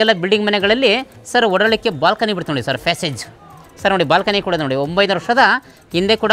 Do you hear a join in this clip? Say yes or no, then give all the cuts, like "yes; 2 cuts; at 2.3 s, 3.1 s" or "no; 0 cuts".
no; 0 cuts